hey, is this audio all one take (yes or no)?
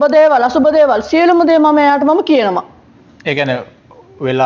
yes